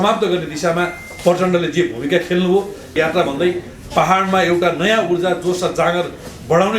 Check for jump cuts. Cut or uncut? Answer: cut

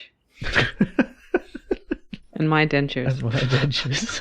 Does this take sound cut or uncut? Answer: cut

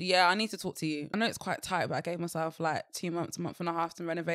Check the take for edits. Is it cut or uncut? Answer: cut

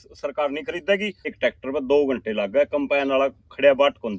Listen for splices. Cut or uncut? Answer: cut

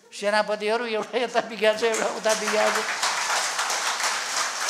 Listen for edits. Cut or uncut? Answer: uncut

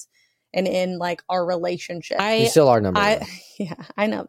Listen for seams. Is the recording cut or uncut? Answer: cut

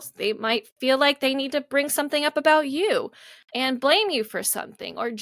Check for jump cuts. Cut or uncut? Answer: uncut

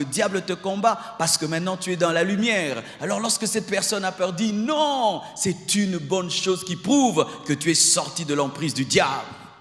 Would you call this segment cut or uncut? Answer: uncut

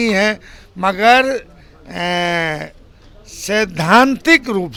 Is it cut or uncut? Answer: uncut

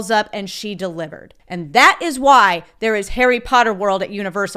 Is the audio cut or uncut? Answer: cut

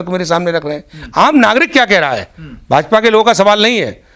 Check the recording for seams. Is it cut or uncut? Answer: uncut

